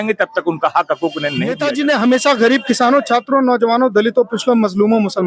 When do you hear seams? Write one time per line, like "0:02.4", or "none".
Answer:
0:01.5